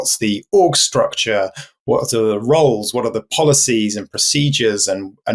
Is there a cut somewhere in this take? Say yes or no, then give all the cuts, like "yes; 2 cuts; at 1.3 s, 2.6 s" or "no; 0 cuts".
no; 0 cuts